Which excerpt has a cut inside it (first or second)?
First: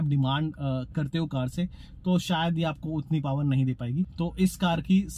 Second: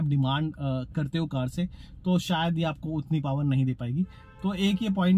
first